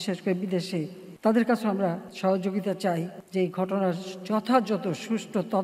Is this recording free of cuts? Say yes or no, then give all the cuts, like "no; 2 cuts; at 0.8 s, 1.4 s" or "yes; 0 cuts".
no; 3 cuts; at 1.0 s, 2.1 s, 3.2 s